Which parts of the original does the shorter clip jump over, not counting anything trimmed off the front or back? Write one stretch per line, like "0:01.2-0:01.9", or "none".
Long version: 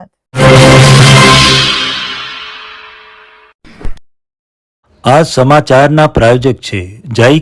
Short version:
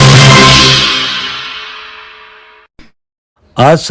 0:03.5-0:04.1